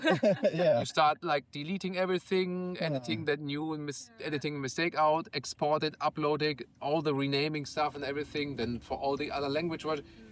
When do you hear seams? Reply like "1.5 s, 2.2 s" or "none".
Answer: none